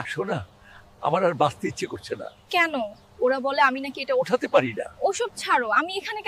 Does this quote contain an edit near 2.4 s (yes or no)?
no